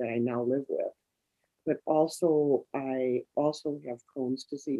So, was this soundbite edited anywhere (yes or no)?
no